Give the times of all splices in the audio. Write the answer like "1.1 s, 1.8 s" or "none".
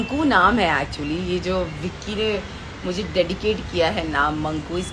none